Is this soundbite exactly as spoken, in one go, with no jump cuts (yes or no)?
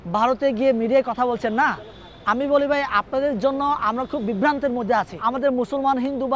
no